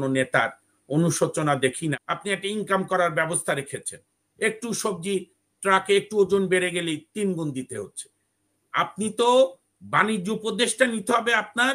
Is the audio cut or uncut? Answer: cut